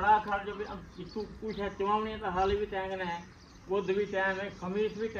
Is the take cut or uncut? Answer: uncut